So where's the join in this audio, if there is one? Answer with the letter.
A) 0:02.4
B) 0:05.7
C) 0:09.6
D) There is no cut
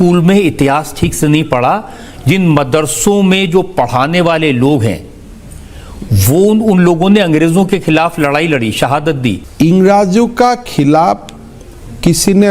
D